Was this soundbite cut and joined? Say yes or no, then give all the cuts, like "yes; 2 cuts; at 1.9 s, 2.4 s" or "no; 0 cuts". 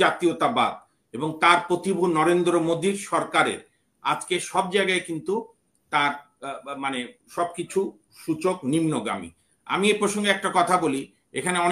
no; 0 cuts